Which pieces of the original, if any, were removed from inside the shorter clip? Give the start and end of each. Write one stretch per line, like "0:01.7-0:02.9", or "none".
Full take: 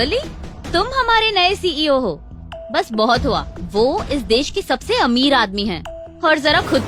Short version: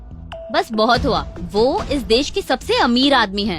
none